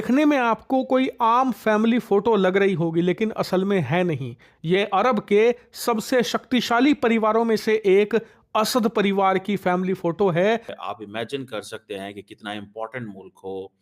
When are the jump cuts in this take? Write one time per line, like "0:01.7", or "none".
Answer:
0:10.8

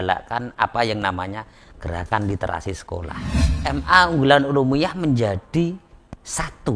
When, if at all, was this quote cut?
0:03.5

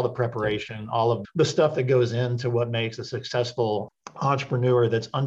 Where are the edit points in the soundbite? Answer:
0:03.9

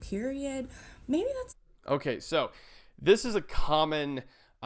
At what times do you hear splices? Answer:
none

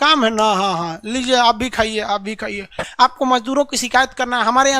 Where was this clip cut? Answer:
0:02.8

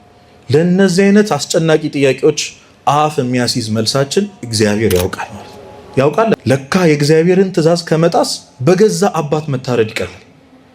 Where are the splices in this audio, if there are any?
0:06.3

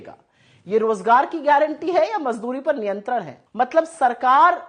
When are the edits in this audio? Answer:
0:03.4

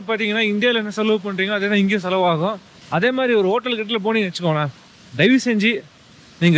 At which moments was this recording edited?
0:02.7

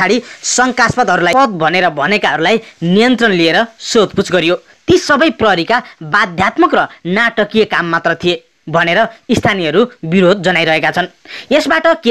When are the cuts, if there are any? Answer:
0:01.3

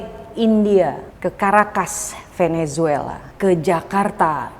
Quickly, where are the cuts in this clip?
0:01.1
0:03.2

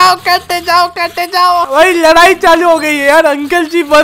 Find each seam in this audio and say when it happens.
0:01.7

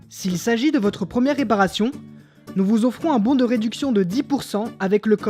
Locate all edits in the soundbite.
none

